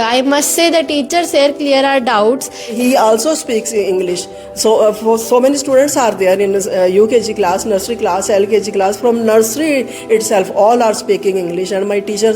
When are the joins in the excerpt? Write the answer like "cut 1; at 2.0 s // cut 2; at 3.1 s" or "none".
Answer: cut 1; at 2.8 s